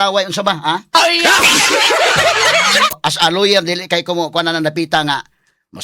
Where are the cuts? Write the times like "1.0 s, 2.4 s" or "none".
3.0 s